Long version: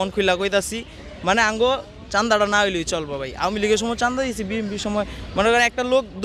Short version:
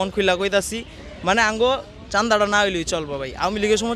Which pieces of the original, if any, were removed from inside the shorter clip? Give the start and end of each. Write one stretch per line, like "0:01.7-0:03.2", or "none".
none